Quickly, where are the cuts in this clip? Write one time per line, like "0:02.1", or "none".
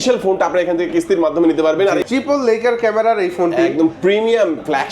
0:02.0